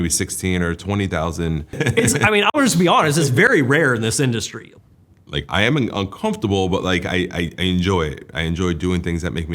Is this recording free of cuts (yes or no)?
no